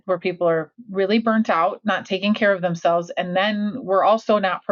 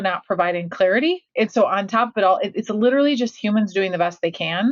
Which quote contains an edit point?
second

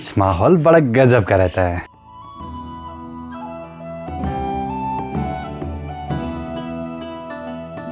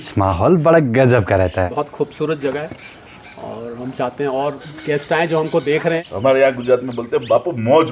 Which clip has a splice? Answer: second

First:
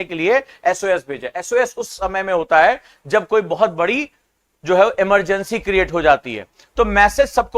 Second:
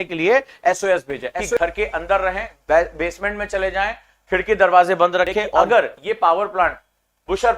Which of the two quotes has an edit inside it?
second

